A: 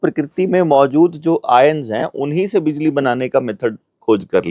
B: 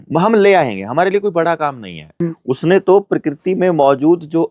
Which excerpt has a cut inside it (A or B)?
B